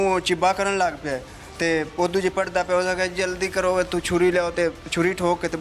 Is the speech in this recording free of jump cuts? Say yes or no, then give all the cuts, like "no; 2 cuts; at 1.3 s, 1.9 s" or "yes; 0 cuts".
yes; 0 cuts